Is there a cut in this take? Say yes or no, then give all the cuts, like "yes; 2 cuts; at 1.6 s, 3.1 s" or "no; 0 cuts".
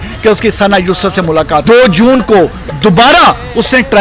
yes; 1 cut; at 1.6 s